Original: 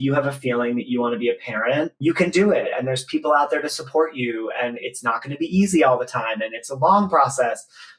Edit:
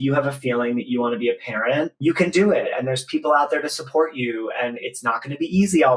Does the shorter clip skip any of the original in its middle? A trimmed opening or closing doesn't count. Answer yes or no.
no